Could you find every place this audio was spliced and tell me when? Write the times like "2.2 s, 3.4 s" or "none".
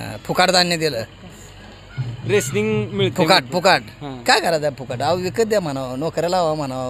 none